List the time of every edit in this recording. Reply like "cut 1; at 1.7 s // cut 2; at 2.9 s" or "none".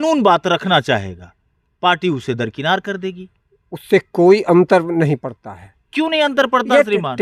none